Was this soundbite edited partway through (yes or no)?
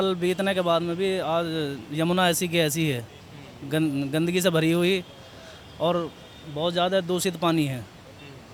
no